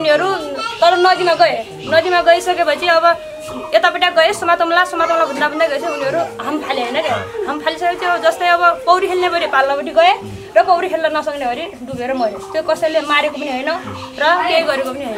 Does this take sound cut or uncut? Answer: uncut